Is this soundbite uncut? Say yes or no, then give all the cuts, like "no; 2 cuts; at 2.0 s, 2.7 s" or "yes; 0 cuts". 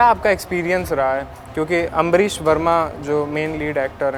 yes; 0 cuts